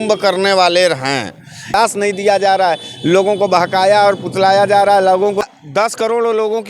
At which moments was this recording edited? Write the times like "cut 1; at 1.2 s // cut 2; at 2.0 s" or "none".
cut 1; at 1.7 s // cut 2; at 5.5 s